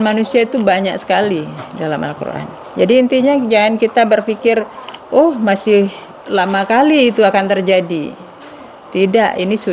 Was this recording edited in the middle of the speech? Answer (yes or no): no